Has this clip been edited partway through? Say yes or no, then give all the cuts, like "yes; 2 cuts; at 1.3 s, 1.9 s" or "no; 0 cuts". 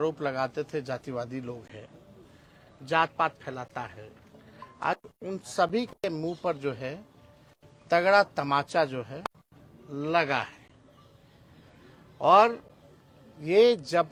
no; 0 cuts